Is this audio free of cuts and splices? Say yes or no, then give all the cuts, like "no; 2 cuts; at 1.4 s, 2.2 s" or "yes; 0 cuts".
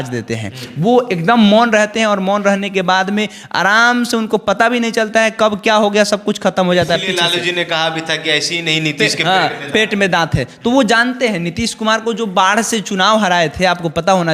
yes; 0 cuts